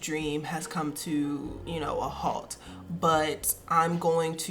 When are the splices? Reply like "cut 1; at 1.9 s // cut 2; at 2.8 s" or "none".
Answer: cut 1; at 1.6 s